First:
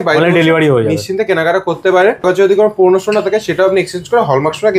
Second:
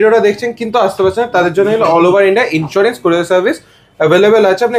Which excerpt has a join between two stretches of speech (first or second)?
first